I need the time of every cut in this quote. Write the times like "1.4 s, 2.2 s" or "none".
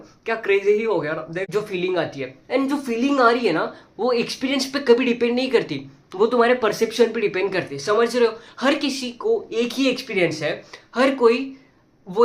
1.4 s